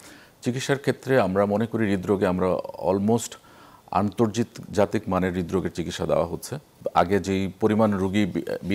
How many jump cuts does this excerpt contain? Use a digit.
1